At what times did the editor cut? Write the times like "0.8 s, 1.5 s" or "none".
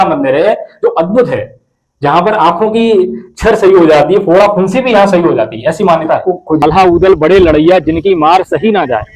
1.3 s, 6.6 s